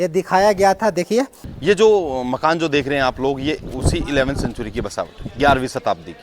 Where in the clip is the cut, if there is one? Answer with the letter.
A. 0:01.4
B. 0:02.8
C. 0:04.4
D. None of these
A